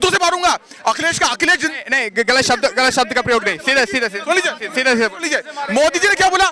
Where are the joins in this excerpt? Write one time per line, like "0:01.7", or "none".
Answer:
none